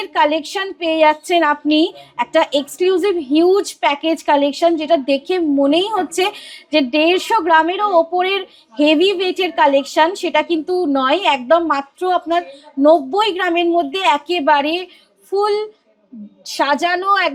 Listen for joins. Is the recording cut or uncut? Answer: uncut